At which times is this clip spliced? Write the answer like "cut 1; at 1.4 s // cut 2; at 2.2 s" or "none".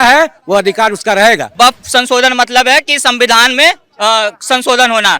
cut 1; at 1.5 s